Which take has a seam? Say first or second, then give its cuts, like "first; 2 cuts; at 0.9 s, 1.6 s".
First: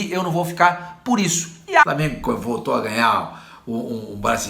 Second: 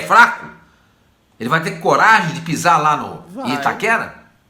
first; 1 cut; at 1.8 s